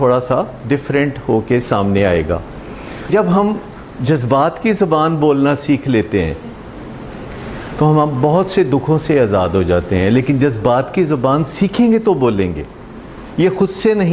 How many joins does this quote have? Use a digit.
1